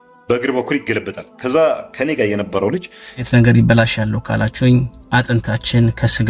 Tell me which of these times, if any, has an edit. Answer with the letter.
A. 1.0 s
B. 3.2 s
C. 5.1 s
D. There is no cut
B